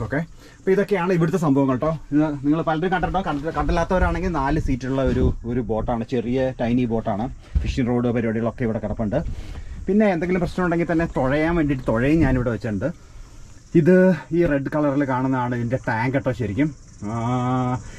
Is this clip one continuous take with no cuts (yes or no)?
yes